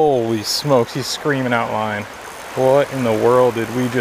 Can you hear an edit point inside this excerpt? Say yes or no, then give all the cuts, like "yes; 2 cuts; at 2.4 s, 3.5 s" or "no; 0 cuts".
no; 0 cuts